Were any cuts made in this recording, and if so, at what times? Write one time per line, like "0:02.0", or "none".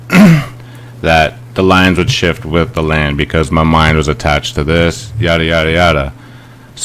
0:03.2